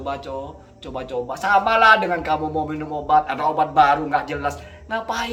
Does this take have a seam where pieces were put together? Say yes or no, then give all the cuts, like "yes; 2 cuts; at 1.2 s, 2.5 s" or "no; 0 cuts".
no; 0 cuts